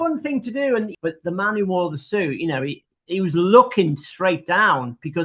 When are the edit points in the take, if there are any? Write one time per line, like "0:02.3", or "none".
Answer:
0:00.9